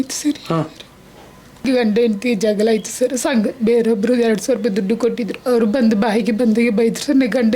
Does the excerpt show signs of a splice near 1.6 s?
yes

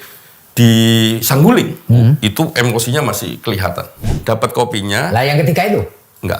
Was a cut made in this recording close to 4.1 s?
yes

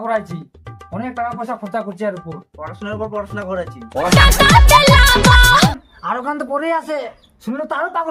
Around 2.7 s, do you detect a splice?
no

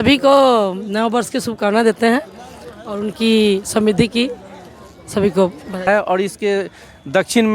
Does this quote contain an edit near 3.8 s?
no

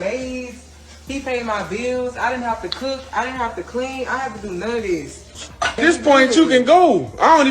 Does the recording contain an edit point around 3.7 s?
no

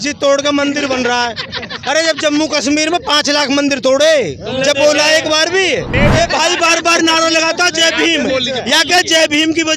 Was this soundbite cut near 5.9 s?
yes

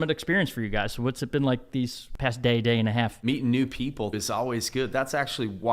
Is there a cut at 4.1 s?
yes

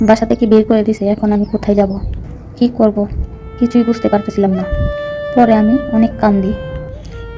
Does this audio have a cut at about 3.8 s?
no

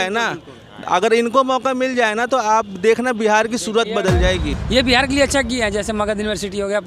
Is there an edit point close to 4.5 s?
yes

